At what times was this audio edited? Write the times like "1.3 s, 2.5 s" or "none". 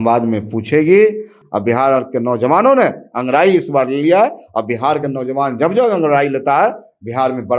1.3 s